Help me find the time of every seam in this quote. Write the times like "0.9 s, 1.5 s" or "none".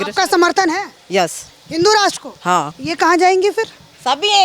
2.8 s